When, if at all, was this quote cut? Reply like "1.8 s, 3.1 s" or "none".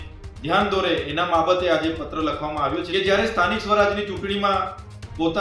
2.9 s